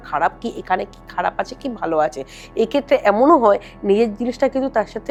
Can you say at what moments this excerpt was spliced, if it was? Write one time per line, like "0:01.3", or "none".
none